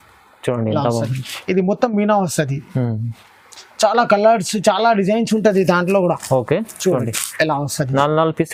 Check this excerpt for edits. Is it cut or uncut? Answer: uncut